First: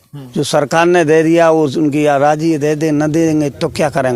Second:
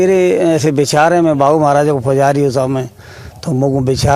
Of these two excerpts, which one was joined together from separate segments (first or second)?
first